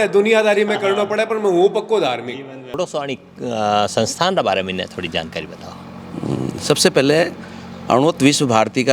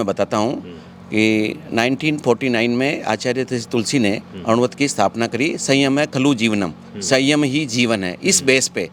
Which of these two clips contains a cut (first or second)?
first